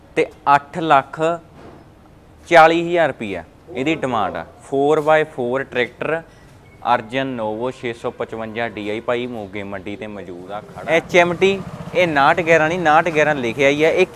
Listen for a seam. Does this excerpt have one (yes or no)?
yes